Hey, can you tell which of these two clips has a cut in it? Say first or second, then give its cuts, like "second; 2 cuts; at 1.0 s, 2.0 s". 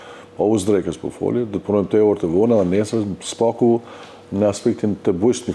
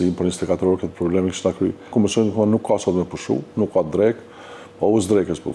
second; 1 cut; at 1.9 s